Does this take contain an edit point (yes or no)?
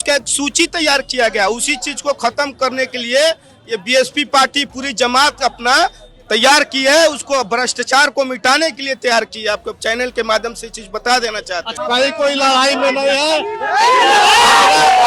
yes